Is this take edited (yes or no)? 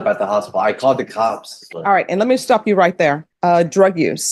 yes